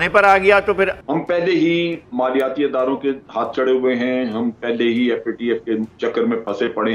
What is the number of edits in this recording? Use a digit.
1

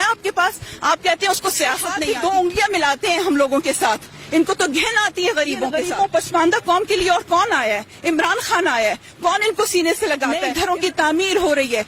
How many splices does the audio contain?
3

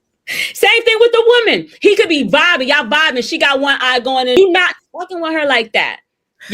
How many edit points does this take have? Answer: 1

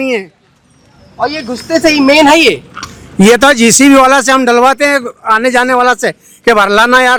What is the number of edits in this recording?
0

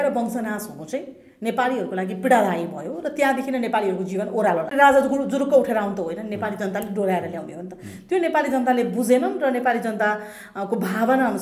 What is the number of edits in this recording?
1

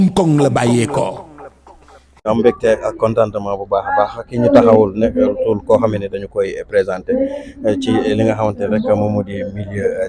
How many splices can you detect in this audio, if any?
1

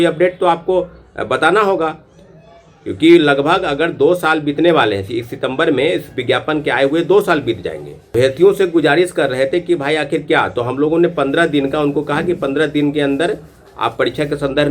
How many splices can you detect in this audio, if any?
1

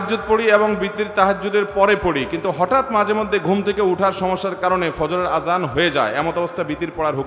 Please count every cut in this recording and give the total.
0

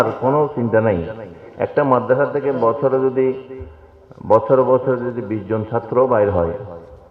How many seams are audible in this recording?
0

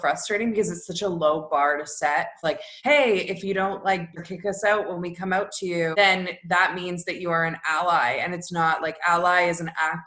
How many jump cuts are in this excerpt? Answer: 3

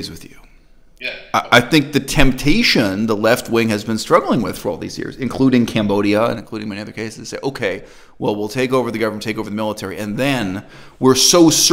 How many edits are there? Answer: 0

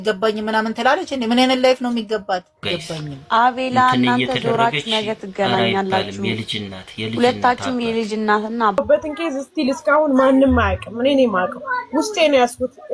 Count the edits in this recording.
2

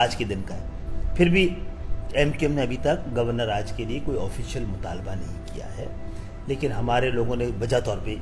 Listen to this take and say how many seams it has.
0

